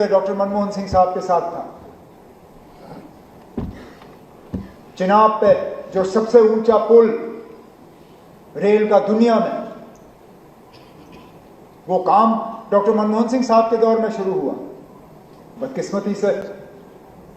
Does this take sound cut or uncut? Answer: uncut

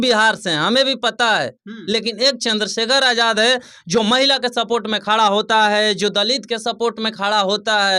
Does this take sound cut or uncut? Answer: uncut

